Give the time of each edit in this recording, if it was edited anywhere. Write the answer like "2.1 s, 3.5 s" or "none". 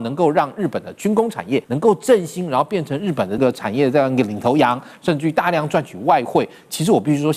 1.7 s, 3.4 s